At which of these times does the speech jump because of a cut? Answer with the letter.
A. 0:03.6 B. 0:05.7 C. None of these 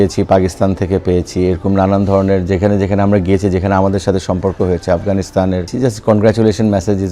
B